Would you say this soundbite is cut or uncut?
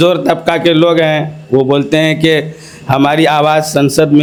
uncut